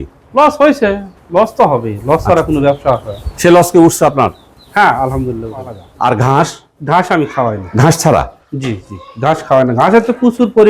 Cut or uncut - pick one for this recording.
cut